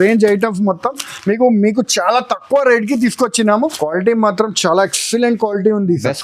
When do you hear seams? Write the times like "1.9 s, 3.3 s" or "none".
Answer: 3.8 s

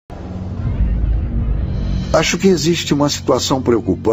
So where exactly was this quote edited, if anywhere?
1.5 s

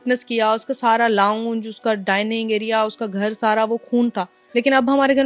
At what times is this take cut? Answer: 4.3 s

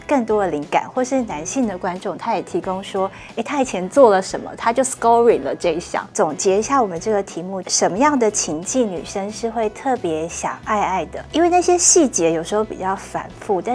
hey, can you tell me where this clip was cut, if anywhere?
6.1 s, 7.6 s, 11.2 s

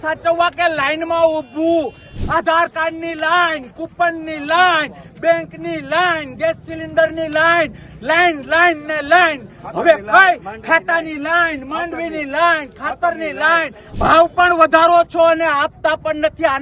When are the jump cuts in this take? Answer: 2.2 s, 13.8 s

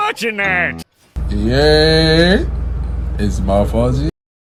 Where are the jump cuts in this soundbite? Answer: none

